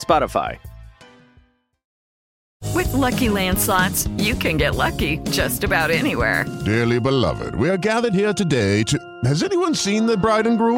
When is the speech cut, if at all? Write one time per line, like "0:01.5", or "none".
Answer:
0:02.4